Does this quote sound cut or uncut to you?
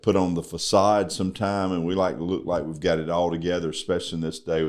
uncut